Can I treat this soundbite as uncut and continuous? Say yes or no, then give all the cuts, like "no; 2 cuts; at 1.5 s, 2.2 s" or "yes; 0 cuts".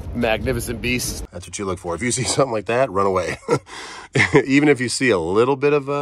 no; 1 cut; at 1.2 s